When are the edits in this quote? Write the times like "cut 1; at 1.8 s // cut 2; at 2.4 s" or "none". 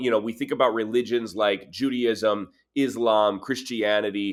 none